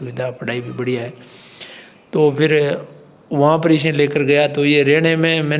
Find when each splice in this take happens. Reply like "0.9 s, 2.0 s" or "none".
none